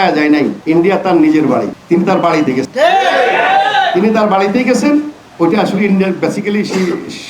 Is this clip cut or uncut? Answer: uncut